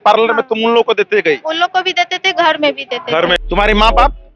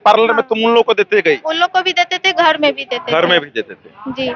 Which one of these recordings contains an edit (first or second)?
first